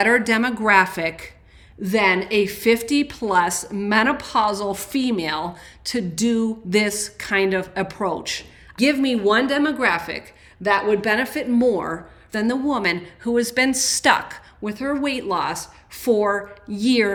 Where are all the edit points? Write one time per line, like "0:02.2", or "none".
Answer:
none